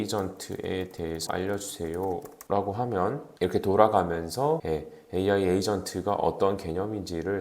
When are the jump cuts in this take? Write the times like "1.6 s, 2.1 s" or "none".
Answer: 1.3 s, 2.3 s, 3.3 s, 4.6 s